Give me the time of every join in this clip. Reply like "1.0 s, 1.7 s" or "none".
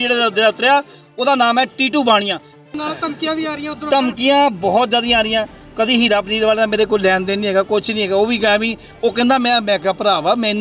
2.7 s